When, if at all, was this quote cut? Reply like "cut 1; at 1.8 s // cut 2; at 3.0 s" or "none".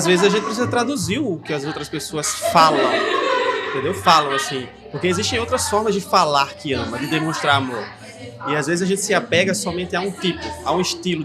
none